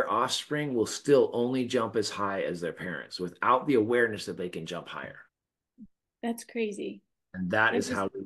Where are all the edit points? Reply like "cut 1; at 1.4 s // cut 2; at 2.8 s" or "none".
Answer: none